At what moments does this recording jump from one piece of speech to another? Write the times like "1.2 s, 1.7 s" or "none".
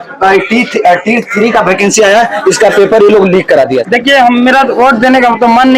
3.8 s